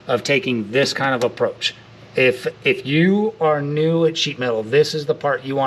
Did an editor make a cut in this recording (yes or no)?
no